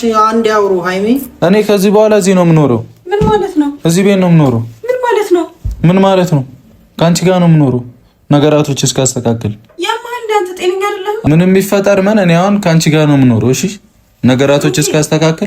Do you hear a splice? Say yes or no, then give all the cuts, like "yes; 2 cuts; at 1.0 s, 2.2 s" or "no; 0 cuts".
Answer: yes; 2 cuts; at 1.3 s, 11.2 s